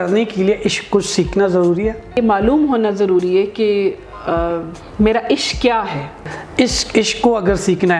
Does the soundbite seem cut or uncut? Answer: cut